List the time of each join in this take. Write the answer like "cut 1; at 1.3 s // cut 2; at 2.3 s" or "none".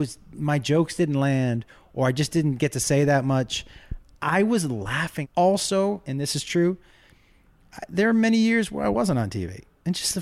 cut 1; at 5.2 s